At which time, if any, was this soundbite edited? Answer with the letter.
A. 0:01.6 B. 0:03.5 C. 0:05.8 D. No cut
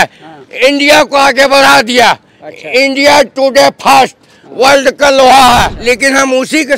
C